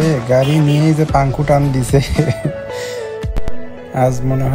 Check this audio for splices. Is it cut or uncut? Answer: uncut